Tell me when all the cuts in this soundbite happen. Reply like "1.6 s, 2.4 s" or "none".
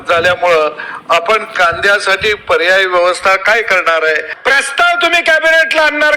4.3 s